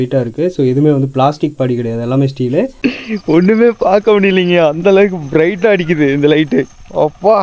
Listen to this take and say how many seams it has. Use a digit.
1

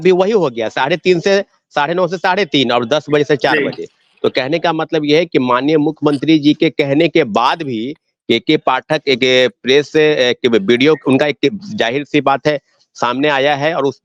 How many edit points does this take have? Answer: 0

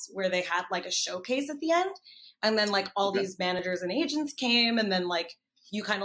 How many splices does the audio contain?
0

